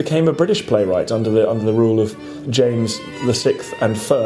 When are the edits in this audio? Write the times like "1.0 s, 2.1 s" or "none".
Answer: 2.6 s